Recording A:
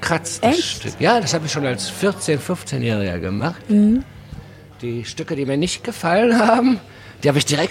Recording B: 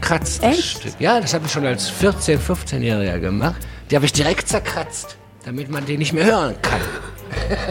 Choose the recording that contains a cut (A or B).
B